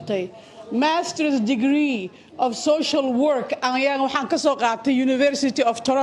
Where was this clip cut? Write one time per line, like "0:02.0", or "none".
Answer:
none